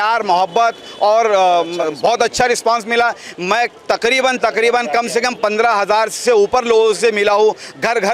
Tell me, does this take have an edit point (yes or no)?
no